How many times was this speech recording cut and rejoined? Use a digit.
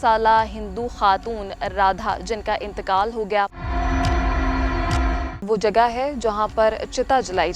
2